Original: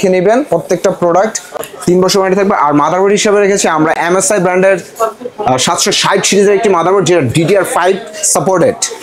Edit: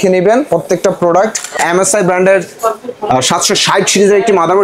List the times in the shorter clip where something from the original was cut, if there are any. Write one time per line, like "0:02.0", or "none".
0:01.6